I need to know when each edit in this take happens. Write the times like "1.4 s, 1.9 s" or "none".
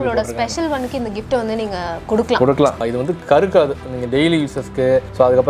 2.8 s

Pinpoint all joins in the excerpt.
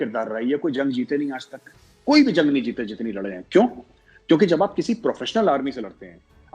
none

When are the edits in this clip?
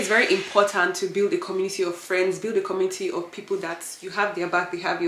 none

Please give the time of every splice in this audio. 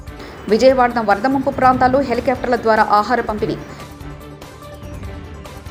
none

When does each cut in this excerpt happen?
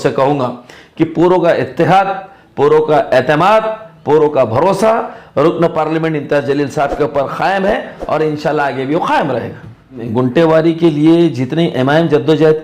10.0 s

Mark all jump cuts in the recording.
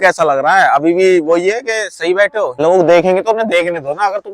2.5 s

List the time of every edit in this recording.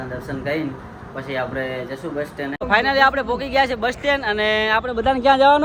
2.6 s

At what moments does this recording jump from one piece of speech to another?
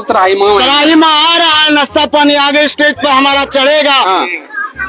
none

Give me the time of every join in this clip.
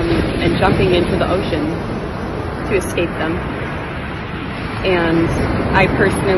none

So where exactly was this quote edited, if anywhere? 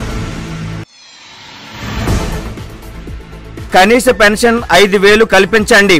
none

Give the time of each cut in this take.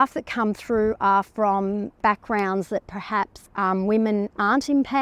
2.0 s, 3.4 s

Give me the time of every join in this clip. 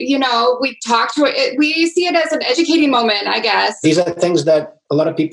2.6 s, 3.8 s

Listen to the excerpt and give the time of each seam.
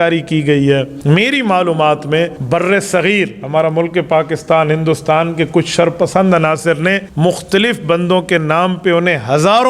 0.9 s, 2.4 s, 7.1 s

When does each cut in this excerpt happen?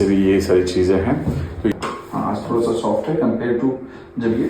1.7 s

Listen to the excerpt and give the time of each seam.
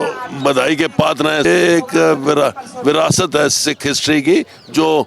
1.4 s

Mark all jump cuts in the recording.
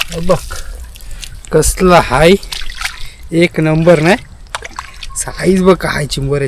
none

